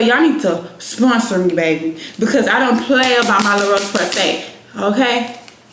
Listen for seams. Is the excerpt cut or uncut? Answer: uncut